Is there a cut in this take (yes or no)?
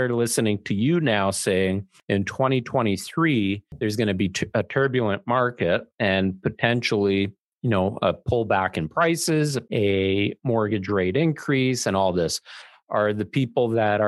yes